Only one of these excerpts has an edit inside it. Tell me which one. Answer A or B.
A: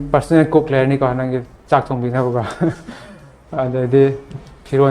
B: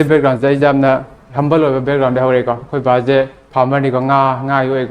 B